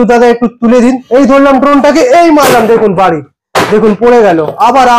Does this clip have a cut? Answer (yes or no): yes